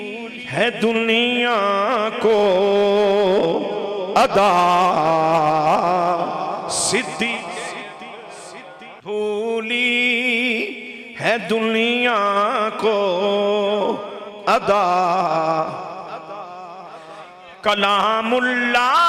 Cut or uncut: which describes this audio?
cut